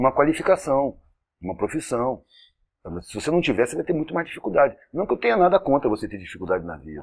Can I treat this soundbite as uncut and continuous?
no; 1 cut; at 5.2 s

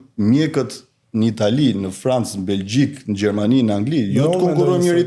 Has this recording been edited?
no; 0 cuts

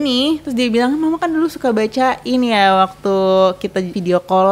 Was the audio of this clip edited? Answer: no; 0 cuts

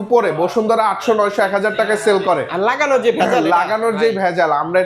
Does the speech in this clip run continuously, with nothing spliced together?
yes; 0 cuts

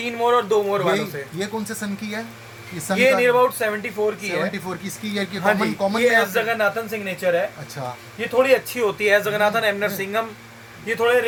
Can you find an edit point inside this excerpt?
no; 0 cuts

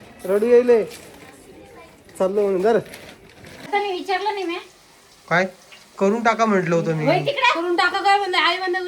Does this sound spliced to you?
yes; 1 cut; at 3.7 s

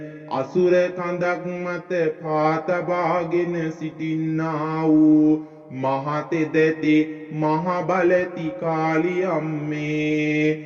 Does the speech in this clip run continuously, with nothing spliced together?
yes; 0 cuts

